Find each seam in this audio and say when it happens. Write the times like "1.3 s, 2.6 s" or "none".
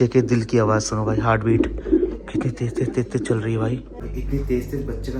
4.0 s